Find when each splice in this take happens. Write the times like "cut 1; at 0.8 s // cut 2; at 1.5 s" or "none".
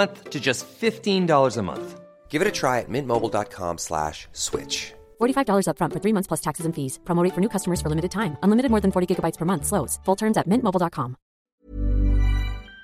cut 1; at 11.5 s